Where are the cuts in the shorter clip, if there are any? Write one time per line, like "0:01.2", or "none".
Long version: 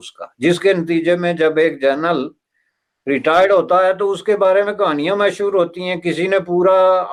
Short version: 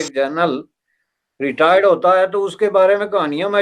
none